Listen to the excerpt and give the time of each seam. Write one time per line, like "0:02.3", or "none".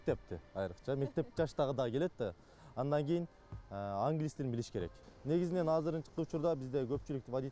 0:05.0